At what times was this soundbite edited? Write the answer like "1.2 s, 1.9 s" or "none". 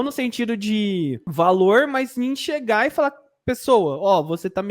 1.2 s